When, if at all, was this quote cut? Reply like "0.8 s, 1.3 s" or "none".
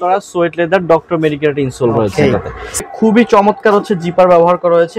2.8 s